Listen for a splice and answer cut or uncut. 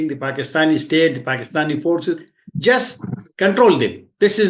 uncut